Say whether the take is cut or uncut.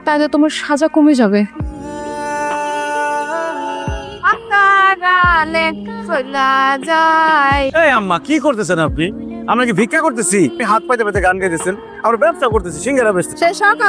uncut